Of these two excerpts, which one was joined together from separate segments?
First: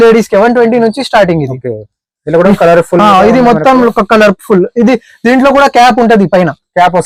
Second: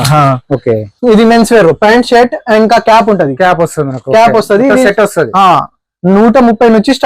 second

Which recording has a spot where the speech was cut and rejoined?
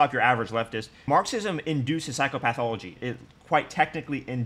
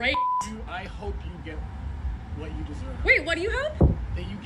first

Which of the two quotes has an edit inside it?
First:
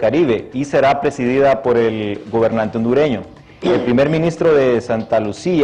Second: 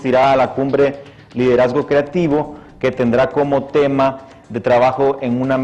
first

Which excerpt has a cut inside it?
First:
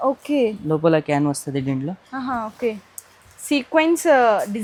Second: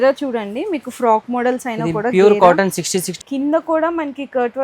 second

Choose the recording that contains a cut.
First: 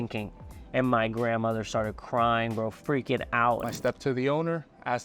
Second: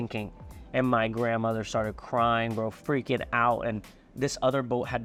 first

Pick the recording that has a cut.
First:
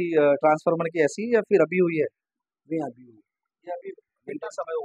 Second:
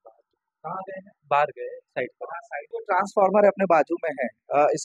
second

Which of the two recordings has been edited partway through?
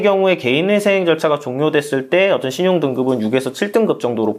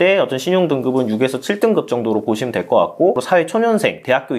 second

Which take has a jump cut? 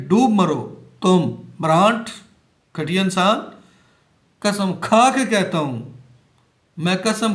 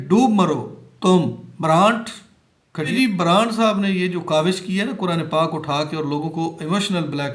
second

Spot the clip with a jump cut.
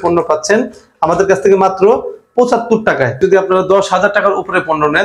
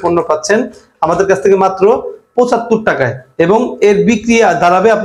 first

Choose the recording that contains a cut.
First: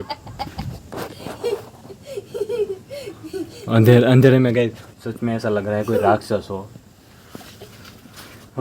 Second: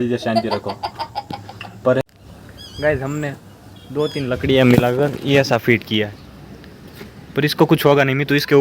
second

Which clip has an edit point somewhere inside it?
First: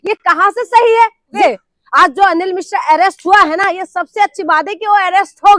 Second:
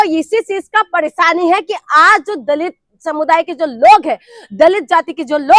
first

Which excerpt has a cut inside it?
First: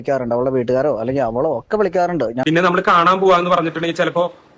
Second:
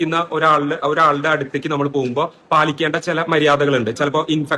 first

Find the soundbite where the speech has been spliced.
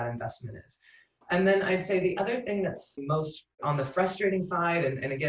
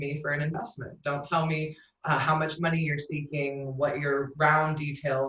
first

